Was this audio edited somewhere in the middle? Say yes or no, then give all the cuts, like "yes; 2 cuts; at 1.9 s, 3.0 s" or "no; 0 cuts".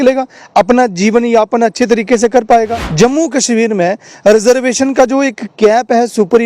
yes; 1 cut; at 2.8 s